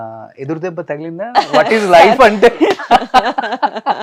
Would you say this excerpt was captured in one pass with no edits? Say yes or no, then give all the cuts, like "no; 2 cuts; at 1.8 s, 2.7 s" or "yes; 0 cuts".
yes; 0 cuts